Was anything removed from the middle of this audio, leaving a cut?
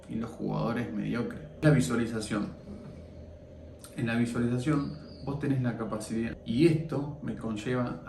yes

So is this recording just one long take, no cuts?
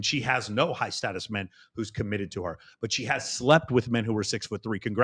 yes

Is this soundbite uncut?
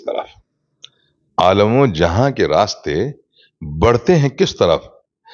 yes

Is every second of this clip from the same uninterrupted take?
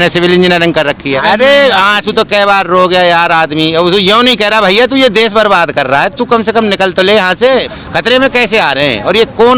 no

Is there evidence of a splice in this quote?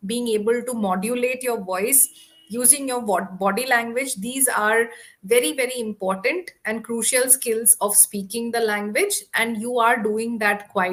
no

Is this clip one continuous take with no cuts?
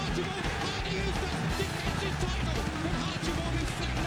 yes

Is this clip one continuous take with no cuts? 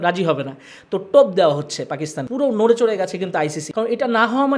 no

